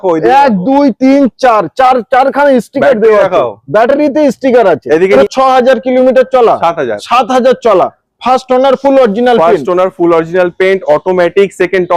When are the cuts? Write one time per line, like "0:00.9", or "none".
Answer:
0:05.1